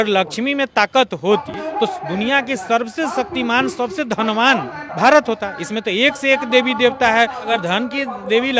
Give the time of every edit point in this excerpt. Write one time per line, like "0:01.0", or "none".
0:01.5
0:04.8
0:07.5